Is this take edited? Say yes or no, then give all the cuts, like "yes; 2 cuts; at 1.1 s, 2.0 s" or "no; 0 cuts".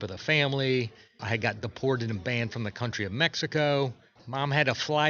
yes; 2 cuts; at 1.2 s, 4.2 s